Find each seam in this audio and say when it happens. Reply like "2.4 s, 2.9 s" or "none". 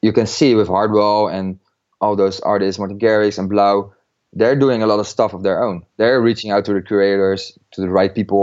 5.8 s